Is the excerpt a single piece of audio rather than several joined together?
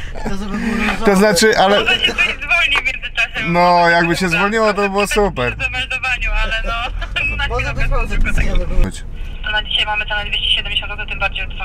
yes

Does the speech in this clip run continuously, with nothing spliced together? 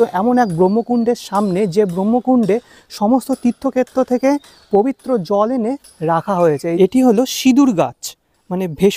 no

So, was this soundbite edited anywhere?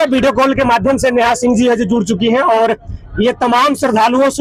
no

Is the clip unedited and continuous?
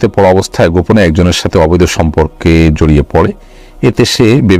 yes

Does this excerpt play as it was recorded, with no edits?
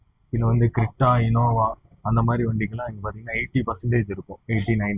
yes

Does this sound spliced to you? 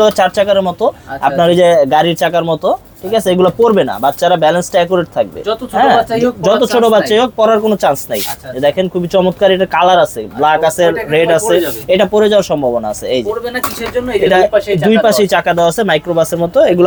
no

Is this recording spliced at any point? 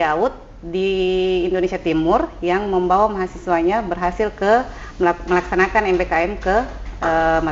no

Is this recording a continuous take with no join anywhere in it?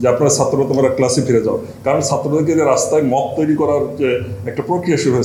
yes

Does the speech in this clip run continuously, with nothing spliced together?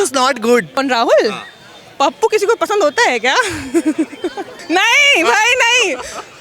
no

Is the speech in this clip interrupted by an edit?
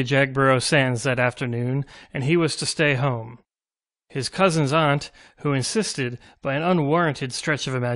no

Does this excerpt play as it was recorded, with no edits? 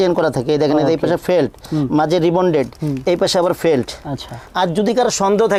yes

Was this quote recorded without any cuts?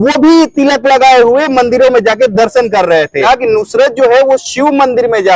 no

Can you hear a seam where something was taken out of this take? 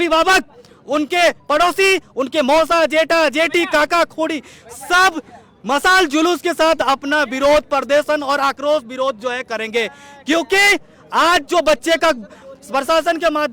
no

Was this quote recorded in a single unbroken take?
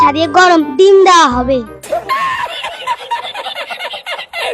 no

